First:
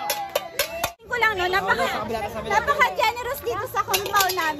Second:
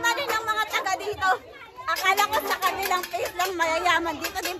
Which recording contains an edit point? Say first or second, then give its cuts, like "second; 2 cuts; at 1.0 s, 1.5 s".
first; 1 cut; at 1.0 s